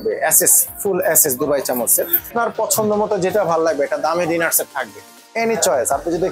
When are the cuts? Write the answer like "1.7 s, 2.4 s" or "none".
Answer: 2.3 s